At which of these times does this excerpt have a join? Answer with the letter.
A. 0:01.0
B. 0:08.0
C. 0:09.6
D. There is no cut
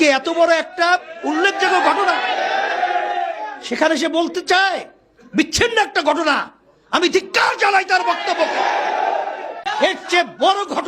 C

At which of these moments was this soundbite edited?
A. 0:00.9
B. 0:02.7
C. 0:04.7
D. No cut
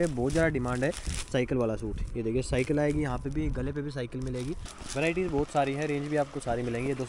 C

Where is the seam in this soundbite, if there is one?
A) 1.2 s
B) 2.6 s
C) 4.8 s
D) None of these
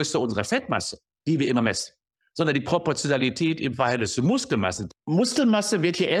C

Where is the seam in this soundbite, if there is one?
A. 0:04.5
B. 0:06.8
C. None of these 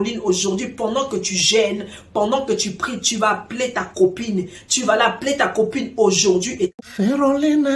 B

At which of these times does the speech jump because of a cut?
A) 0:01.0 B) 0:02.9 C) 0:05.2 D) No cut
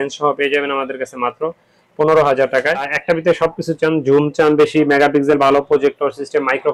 B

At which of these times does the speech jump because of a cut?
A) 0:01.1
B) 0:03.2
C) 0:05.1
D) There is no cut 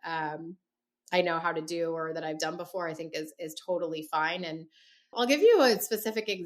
C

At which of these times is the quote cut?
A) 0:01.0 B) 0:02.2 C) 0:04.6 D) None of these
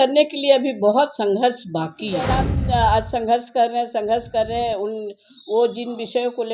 B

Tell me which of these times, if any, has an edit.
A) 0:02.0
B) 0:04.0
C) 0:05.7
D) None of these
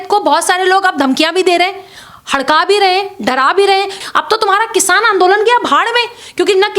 B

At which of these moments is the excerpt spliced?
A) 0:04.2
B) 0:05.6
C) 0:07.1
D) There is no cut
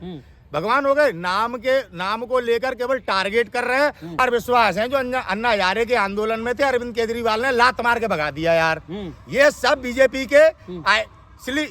A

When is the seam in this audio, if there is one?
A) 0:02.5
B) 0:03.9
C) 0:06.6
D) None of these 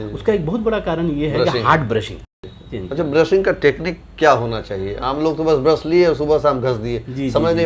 A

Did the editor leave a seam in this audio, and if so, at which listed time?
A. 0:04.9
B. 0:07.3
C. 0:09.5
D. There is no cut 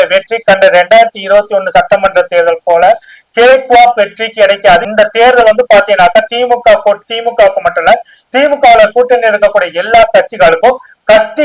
A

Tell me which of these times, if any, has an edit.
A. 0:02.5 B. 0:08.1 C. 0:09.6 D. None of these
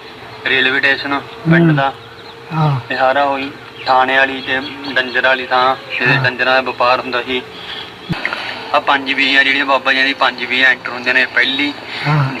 B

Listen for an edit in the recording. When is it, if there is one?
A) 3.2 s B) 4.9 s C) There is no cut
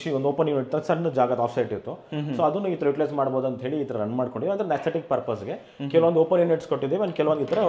C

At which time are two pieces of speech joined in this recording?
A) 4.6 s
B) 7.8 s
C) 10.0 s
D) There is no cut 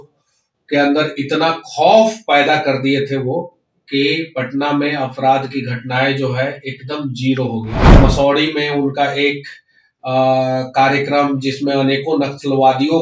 B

